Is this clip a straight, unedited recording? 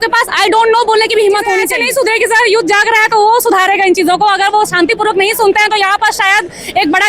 no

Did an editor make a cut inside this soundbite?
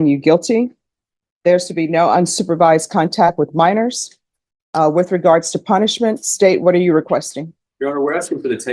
no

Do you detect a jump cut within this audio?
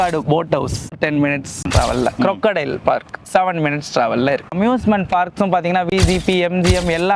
yes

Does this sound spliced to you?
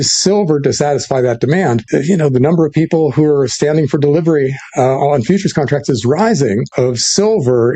yes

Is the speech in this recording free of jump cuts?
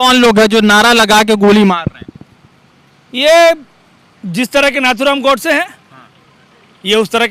yes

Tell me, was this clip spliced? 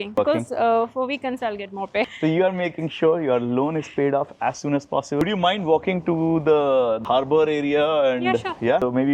yes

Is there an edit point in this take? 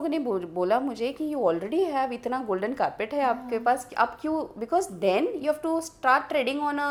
no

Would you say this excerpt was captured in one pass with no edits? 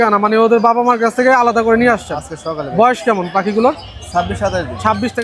yes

